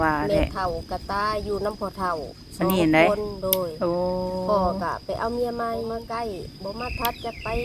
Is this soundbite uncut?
no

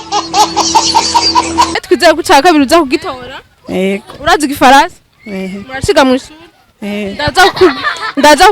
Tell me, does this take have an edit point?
yes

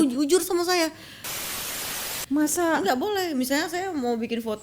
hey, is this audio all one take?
no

